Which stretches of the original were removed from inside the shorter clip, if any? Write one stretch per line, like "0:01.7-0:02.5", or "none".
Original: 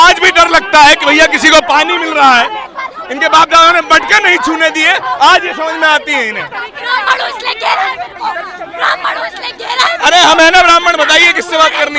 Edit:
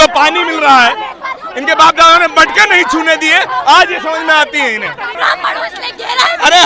0:06.7-0:08.7